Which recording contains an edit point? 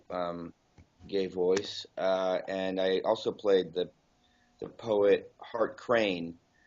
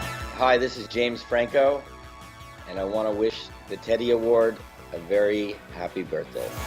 first; 1 cut; at 4.1 s

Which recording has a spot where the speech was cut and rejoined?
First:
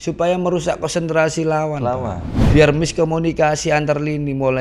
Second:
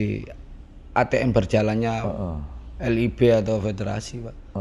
first; 1 cut; at 2.3 s

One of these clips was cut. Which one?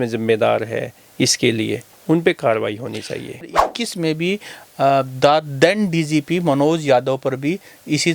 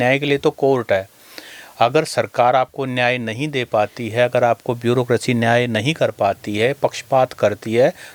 first; 1 cut; at 3.5 s

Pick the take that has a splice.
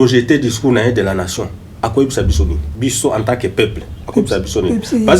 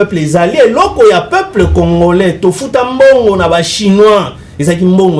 first; 1 cut; at 2.6 s

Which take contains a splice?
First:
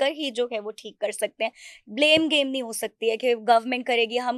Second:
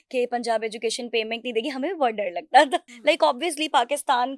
second; 1 cut; at 2.9 s

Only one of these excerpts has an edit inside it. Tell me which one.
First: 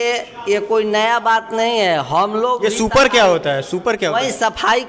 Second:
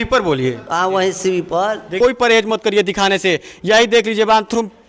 second; 1 cut; at 1.9 s

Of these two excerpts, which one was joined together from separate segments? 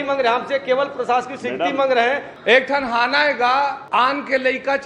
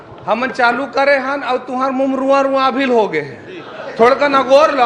first; 2 cuts; at 2.3 s, 3.8 s

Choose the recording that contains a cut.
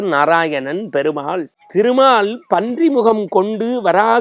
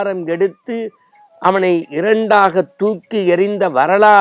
first; 1 cut; at 1.5 s

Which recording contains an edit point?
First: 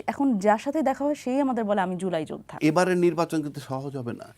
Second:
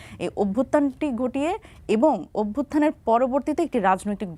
first; 1 cut; at 2.6 s

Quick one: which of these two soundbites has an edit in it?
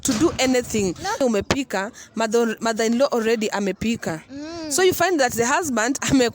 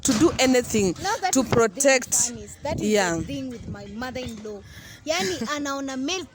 first; 1 cut; at 1.2 s

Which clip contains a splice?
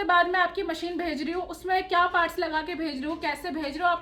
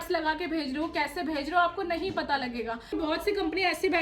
second; 1 cut; at 2.9 s

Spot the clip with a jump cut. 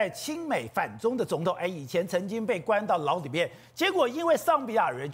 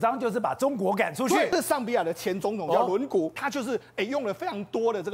second; 2 cuts; at 1.5 s, 3.4 s

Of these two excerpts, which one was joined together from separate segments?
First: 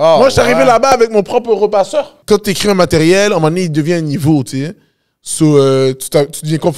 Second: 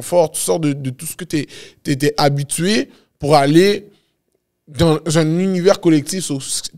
first; 1 cut; at 2.1 s

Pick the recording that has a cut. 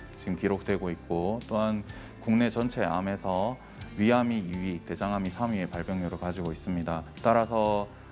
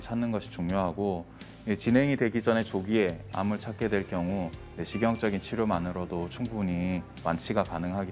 first; 1 cut; at 7.1 s

